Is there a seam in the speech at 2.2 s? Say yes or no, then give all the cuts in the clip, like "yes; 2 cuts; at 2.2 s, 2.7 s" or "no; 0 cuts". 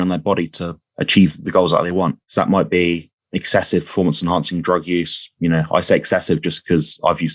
yes; 1 cut; at 2.2 s